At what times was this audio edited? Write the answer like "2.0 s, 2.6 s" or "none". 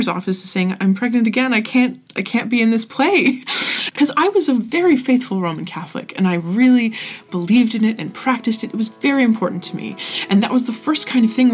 3.9 s